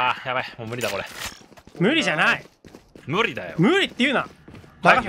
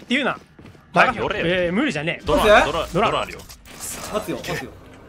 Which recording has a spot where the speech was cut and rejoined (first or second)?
second